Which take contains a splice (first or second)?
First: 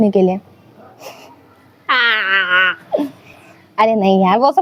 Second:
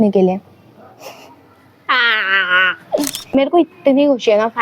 second